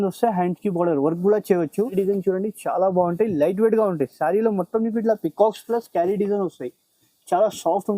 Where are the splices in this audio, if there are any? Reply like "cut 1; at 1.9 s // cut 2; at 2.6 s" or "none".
cut 1; at 1.9 s